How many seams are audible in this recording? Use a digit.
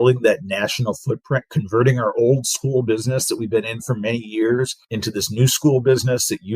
1